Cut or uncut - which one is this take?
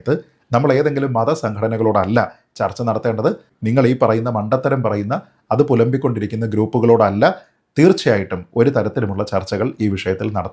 uncut